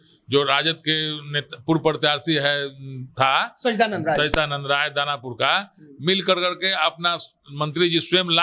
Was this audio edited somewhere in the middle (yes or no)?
no